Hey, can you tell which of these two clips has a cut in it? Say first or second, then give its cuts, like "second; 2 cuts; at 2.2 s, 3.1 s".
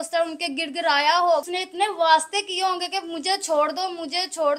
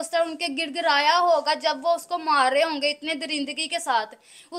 first; 1 cut; at 1.4 s